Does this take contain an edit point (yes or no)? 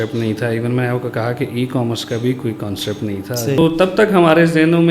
yes